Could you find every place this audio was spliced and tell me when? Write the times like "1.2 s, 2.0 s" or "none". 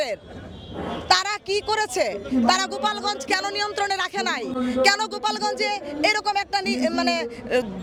none